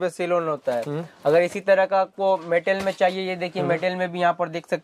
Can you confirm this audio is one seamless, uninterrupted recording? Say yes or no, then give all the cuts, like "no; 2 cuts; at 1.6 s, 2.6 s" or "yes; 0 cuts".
yes; 0 cuts